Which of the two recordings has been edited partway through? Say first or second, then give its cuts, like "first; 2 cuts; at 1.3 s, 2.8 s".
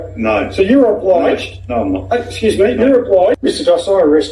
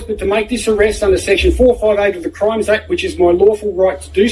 first; 1 cut; at 3.4 s